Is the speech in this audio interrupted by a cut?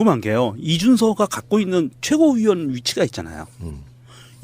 no; 0 cuts

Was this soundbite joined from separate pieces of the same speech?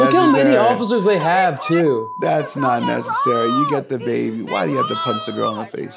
no; 0 cuts

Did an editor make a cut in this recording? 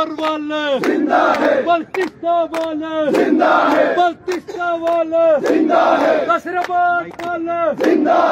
no; 0 cuts

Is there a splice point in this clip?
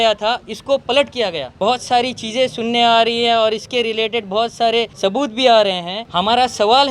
yes; 3 cuts; at 1.5 s, 4.9 s, 5.9 s

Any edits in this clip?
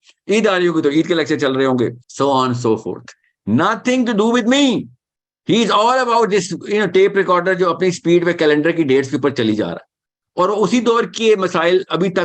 yes; 1 cut; at 2.0 s

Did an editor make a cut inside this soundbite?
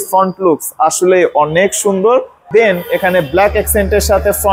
no; 0 cuts

